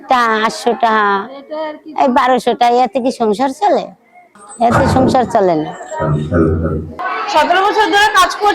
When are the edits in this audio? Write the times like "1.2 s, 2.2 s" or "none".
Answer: none